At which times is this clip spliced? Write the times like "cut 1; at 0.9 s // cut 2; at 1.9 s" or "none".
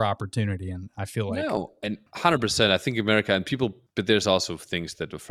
cut 1; at 2.1 s // cut 2; at 3.8 s